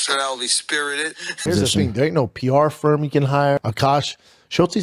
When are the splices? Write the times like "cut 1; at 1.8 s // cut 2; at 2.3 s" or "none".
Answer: cut 1; at 1.4 s // cut 2; at 3.6 s